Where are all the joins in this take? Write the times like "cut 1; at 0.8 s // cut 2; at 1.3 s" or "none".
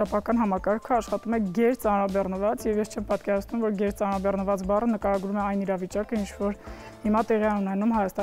none